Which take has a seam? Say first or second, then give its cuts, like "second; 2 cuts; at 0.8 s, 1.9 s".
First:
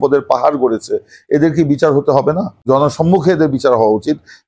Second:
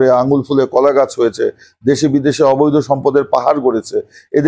first; 1 cut; at 2.6 s